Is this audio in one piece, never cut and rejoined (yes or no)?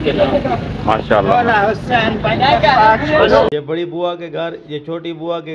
no